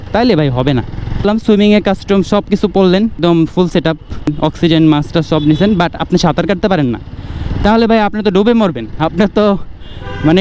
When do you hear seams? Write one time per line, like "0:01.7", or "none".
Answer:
0:01.2
0:03.2
0:04.3